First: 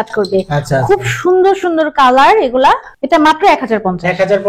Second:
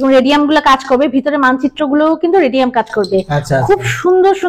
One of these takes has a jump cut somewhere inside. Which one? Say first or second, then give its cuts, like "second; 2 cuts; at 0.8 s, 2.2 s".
first; 1 cut; at 2.9 s